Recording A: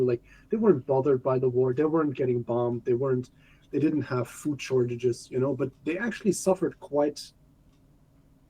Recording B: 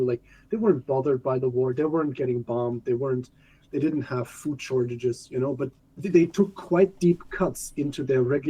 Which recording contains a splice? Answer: B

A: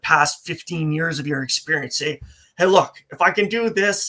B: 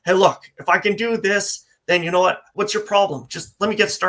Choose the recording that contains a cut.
B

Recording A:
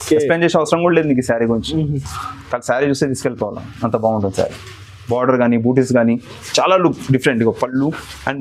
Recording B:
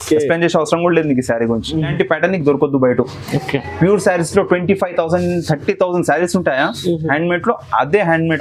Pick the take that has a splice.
B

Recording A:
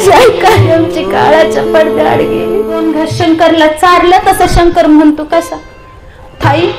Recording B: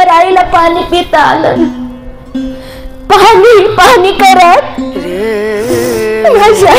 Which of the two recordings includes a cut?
A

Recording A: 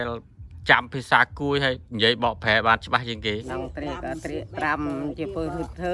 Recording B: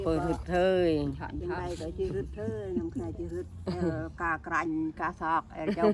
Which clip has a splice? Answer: A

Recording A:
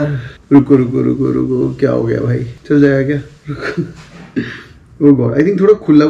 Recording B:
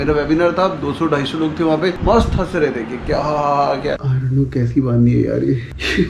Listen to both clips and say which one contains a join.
B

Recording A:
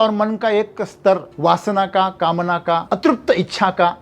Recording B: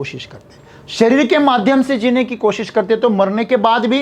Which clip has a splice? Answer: A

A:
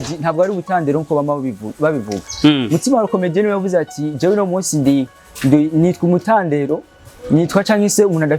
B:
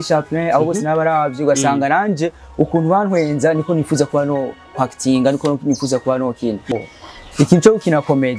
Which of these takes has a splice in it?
B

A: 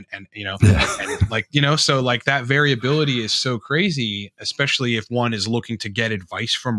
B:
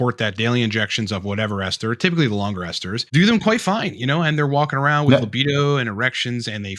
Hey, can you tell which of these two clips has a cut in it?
B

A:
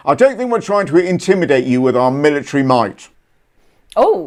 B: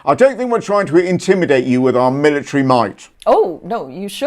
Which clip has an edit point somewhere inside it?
B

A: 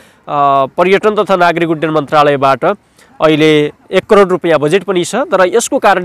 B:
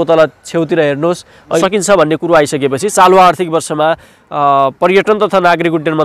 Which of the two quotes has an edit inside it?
B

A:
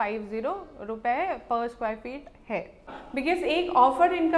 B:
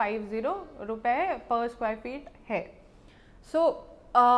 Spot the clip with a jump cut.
A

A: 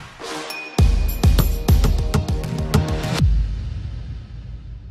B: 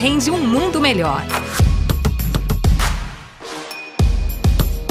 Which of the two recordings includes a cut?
B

